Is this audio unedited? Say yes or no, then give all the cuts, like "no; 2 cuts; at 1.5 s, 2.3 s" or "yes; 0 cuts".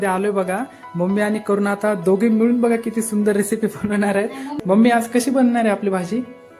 no; 1 cut; at 4.4 s